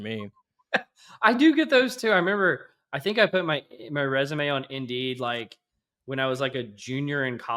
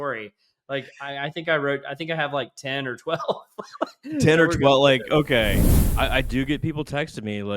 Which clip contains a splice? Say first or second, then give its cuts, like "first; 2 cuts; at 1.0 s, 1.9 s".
second; 1 cut; at 5.8 s